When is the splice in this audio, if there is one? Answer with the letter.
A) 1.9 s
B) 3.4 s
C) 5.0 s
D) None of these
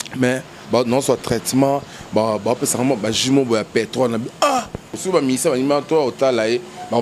C